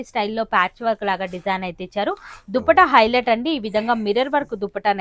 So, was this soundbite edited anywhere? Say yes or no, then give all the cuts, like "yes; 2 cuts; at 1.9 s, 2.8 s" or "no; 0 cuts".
no; 0 cuts